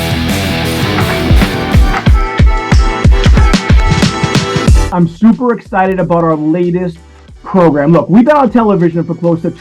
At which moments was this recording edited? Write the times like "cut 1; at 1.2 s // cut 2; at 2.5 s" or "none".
cut 1; at 1.2 s

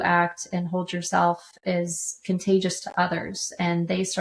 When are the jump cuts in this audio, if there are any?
none

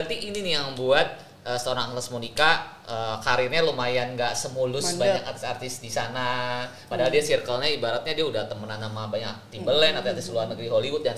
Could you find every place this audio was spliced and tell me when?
none

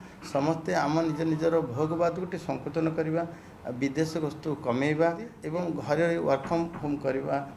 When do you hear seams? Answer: cut 1; at 5.3 s

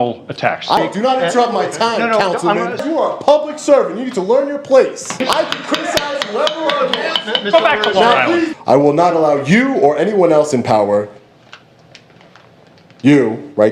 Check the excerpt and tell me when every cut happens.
cut 1; at 0.8 s // cut 2; at 2.8 s // cut 3; at 5.2 s // cut 4; at 8.5 s

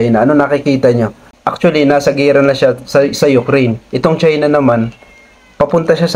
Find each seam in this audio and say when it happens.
cut 1; at 1.2 s

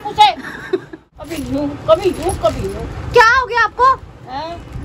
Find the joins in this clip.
cut 1; at 1.0 s

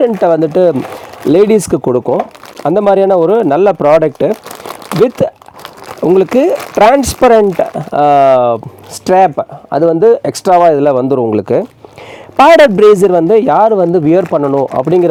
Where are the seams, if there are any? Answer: none

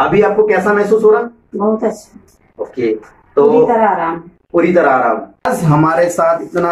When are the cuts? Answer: cut 1; at 5.5 s

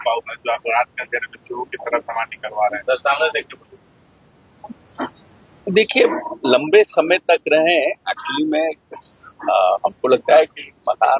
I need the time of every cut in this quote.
none

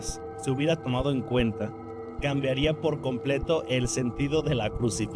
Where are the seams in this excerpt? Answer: none

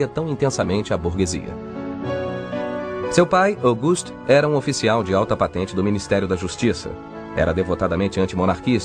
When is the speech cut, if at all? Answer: cut 1; at 5.0 s

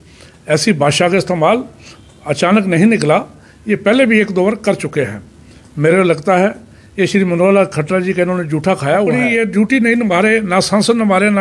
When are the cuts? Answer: cut 1; at 9.2 s

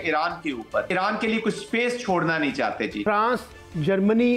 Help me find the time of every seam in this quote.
cut 1; at 0.9 s // cut 2; at 3.0 s

